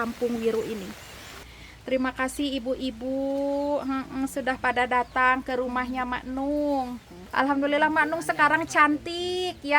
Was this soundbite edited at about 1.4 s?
yes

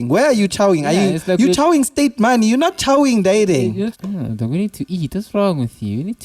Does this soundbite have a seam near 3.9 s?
yes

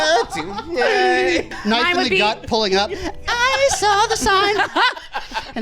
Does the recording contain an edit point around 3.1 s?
no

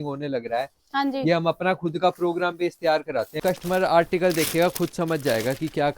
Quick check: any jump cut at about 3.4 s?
yes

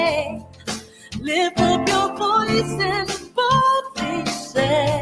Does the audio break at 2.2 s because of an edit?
yes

